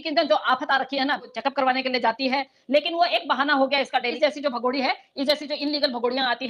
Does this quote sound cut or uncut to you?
cut